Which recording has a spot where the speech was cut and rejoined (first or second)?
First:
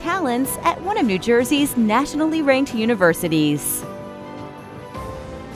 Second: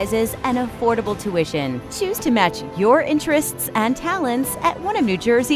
first